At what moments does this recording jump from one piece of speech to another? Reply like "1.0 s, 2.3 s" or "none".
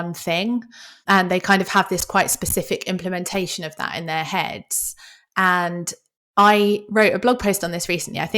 1.0 s